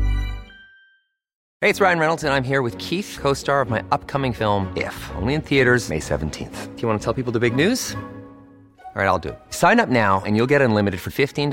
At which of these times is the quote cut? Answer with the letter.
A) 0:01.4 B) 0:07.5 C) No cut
A